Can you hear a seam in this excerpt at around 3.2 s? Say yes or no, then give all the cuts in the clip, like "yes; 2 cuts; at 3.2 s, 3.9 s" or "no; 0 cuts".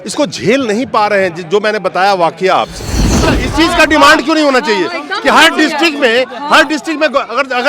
yes; 1 cut; at 3.2 s